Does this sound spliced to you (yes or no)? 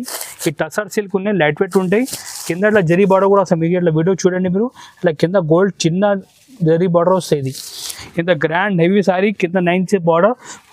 yes